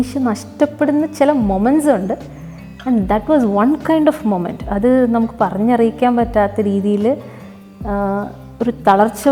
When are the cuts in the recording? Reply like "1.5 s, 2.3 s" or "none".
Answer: none